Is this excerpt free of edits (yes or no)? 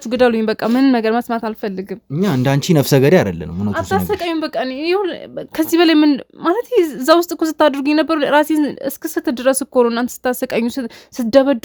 yes